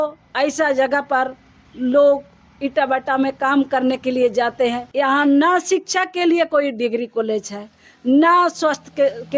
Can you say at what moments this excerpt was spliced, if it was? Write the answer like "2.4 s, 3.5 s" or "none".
4.8 s

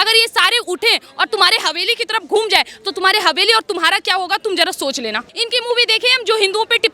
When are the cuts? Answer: 5.3 s

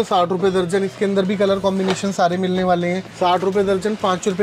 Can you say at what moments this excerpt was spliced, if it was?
3.0 s

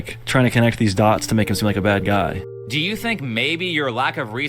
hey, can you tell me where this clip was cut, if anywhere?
2.4 s

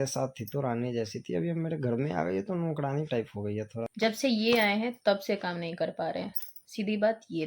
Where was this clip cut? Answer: 3.8 s

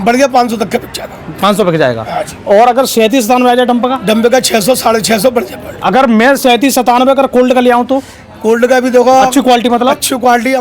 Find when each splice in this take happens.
none

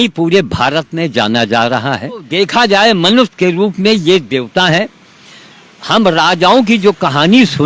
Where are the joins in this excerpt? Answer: 2.3 s

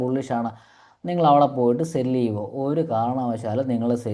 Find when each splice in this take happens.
none

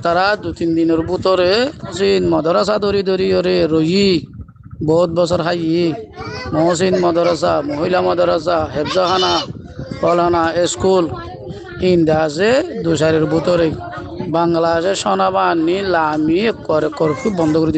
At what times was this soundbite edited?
1.9 s

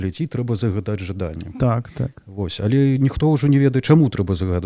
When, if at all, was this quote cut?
none

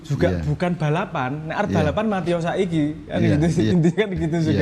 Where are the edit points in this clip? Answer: none

